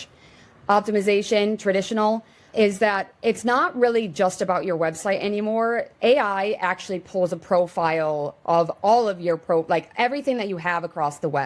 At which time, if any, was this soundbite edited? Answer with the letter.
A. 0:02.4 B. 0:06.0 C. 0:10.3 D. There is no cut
A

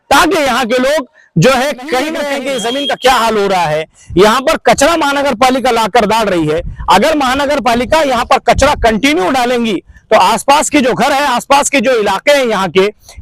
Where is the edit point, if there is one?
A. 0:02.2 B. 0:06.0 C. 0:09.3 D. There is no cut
A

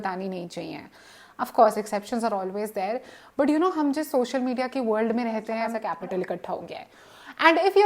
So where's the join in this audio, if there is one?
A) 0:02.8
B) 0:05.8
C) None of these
B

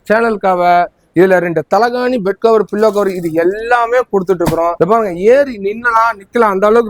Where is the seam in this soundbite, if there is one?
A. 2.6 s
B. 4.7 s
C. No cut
B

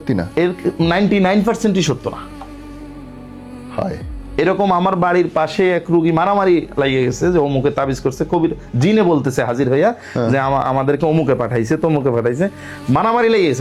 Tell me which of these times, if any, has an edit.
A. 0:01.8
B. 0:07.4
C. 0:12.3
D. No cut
D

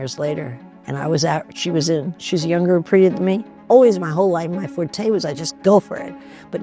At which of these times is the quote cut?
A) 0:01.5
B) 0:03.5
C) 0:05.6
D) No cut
B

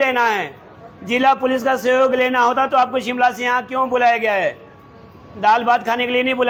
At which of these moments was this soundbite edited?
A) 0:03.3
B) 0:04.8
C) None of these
C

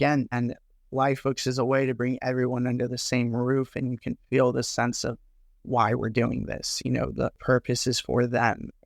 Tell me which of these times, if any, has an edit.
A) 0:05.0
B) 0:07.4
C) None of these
B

